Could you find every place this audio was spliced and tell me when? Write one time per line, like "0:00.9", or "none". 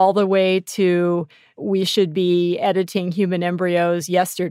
0:01.6